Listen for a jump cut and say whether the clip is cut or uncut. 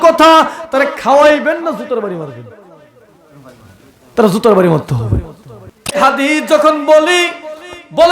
cut